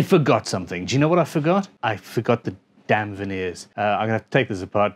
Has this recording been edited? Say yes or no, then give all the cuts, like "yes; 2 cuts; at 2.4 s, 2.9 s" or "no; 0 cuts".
yes; 2 cuts; at 1.8 s, 3.6 s